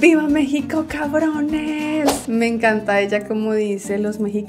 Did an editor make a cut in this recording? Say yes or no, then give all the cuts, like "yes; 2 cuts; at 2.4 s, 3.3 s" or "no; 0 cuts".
yes; 1 cut; at 2.2 s